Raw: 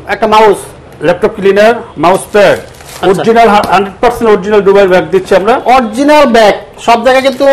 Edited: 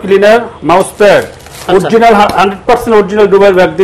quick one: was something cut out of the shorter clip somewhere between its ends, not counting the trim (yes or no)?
no